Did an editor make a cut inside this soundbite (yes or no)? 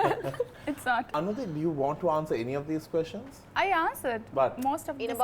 yes